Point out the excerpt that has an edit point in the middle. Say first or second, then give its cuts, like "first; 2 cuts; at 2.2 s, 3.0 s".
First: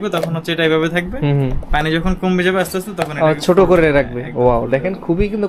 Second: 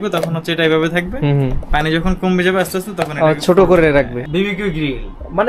second; 1 cut; at 4.2 s